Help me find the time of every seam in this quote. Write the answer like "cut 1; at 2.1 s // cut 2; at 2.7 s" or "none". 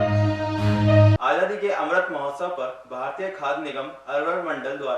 cut 1; at 1.0 s